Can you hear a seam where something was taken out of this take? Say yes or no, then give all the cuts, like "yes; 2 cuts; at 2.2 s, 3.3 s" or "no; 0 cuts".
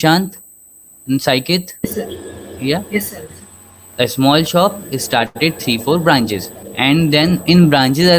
yes; 1 cut; at 1.3 s